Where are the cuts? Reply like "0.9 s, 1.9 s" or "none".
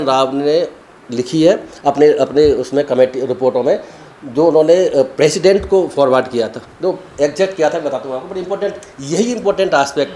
none